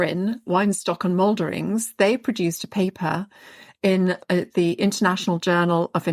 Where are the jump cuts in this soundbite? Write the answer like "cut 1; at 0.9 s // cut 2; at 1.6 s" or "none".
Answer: cut 1; at 4.2 s